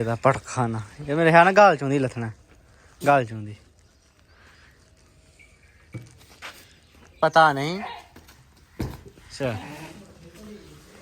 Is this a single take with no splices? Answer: no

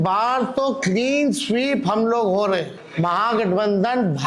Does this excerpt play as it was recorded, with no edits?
no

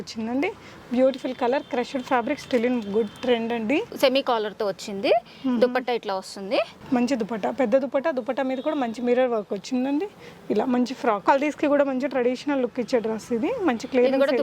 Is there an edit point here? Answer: yes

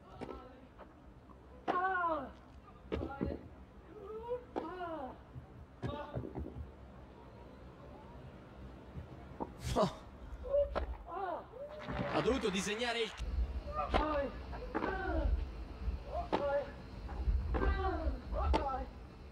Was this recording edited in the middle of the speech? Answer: no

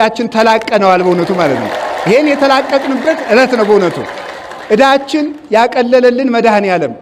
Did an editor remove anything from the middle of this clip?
no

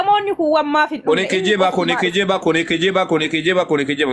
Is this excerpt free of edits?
yes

